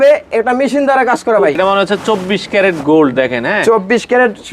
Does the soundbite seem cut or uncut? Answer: cut